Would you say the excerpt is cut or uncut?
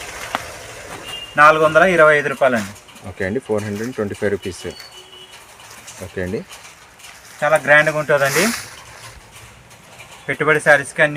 uncut